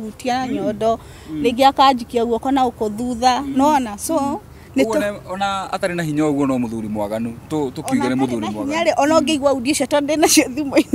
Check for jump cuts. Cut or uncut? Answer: uncut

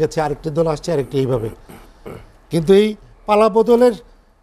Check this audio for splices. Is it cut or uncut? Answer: uncut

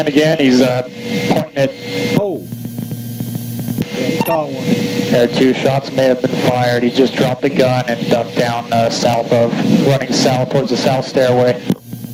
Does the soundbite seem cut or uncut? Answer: uncut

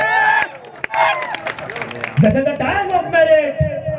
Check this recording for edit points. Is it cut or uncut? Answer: cut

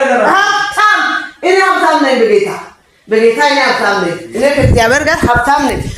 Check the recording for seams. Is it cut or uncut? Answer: uncut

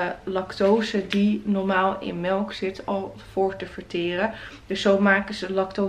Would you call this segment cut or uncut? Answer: uncut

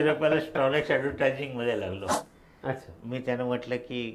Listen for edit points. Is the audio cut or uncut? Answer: cut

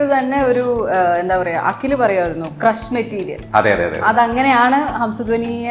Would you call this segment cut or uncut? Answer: uncut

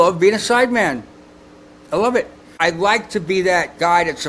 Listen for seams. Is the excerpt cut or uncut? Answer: cut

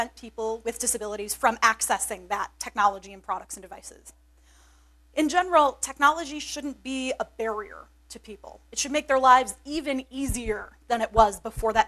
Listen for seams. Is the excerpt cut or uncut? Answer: uncut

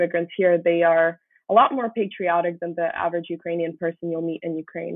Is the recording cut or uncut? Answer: uncut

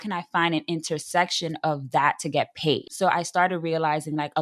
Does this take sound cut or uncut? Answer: cut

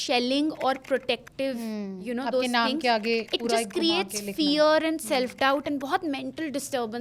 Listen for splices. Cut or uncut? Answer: uncut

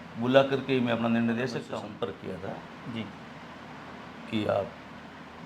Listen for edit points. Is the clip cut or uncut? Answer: cut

